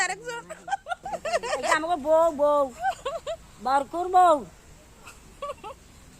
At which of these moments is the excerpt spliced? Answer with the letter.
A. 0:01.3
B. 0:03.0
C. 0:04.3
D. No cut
A